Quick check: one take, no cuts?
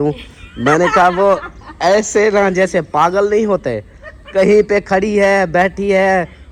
yes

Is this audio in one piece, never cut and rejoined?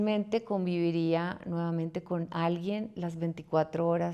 yes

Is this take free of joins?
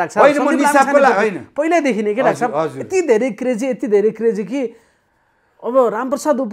yes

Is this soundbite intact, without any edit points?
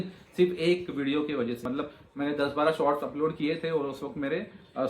no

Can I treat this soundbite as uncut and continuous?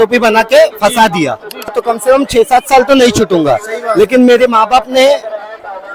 no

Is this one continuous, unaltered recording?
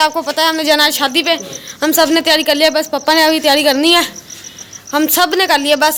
yes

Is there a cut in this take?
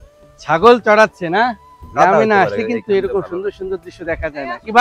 yes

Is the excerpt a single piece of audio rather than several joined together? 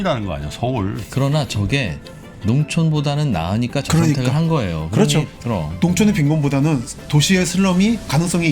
no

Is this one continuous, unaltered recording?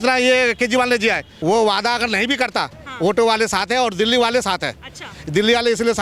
no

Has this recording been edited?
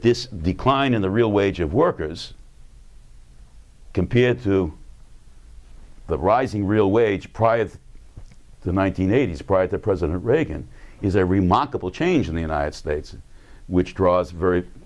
yes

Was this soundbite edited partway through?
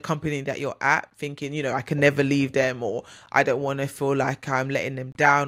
no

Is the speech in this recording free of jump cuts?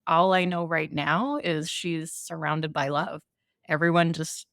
no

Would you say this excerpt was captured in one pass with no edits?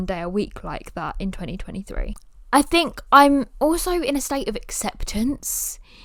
yes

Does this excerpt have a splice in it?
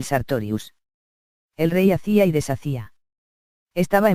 no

